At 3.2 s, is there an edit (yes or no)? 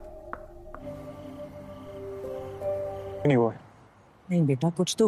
yes